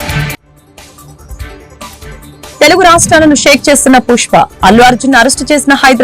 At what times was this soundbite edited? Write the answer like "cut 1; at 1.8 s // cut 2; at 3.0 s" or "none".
cut 1; at 1.5 s